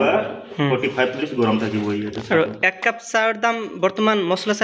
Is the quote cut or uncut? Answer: uncut